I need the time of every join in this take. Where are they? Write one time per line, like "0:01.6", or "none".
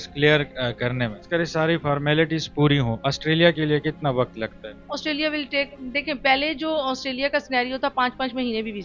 0:01.2